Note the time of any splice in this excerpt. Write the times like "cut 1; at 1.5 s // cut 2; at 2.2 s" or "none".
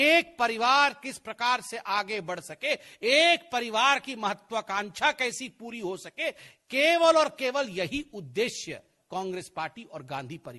none